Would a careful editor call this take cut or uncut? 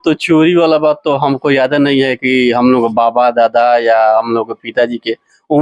uncut